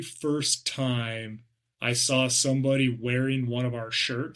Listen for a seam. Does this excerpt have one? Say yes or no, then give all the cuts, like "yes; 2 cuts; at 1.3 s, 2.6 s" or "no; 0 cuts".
no; 0 cuts